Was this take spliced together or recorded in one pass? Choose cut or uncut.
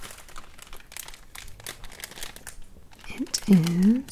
cut